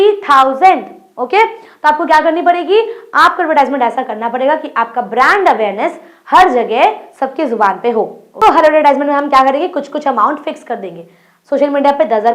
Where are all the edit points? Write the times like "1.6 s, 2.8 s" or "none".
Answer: 8.2 s